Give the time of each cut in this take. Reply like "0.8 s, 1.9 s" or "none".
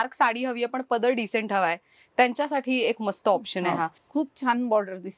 4.0 s